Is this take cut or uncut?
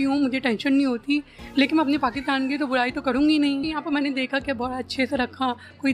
cut